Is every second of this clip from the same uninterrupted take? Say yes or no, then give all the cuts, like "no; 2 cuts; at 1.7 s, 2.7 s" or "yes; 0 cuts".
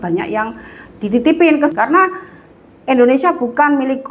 no; 1 cut; at 1.7 s